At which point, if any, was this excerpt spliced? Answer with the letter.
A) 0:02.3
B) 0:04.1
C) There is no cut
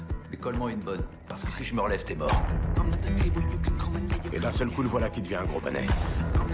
A